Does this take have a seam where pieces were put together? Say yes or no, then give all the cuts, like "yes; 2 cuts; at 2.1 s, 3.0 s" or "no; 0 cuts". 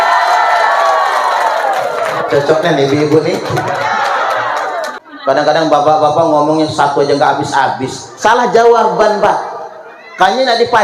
yes; 1 cut; at 5.0 s